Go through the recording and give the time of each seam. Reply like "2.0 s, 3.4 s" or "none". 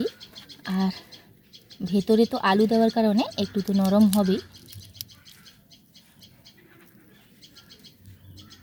none